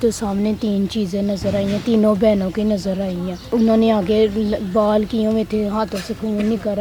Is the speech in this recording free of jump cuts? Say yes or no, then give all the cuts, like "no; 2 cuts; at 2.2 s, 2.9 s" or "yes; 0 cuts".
no; 1 cut; at 3.5 s